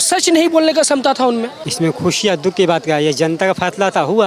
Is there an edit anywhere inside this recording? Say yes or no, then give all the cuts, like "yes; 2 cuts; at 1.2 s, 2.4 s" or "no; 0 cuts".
yes; 1 cut; at 1.6 s